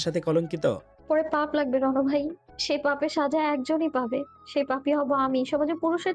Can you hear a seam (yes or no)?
yes